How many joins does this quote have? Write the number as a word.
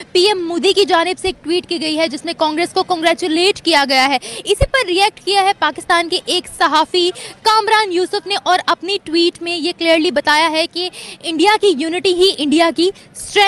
zero